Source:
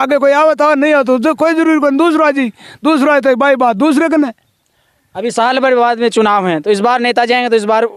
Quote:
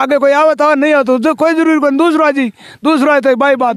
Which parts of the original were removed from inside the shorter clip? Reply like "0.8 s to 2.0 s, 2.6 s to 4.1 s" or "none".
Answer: none